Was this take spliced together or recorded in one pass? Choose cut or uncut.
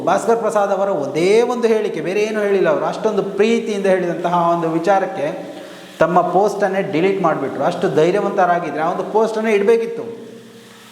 uncut